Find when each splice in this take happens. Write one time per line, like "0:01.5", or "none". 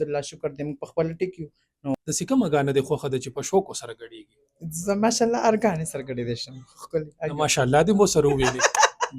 0:01.9